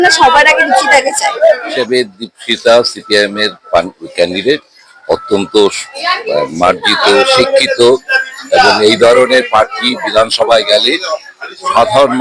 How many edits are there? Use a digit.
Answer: 1